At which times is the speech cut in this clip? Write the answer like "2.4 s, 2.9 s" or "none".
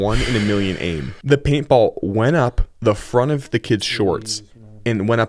none